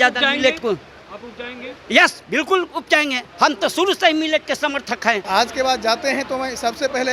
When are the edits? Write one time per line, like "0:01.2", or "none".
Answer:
0:05.2